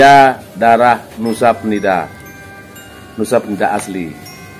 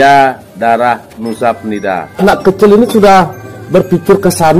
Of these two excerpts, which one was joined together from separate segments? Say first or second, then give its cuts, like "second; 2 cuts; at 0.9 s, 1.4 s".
second; 1 cut; at 2.2 s